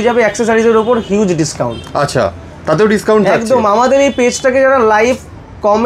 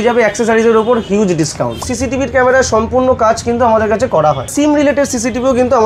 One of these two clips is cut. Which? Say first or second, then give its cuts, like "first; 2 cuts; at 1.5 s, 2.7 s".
second; 2 cuts; at 1.9 s, 4.5 s